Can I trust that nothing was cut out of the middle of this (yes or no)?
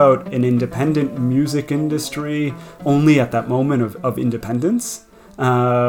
yes